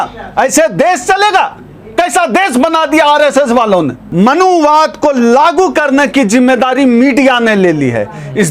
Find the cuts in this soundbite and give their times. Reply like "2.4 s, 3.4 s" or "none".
4.0 s